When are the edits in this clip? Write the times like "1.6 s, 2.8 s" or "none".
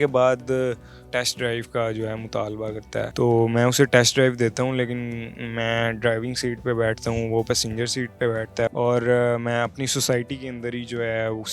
1.0 s, 3.1 s, 8.7 s